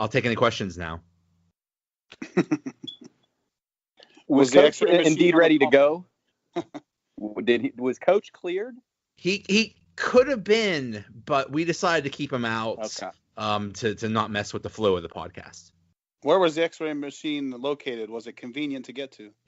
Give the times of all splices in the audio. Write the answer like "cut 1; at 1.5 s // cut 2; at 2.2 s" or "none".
none